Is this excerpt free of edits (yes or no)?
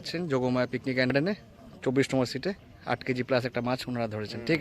no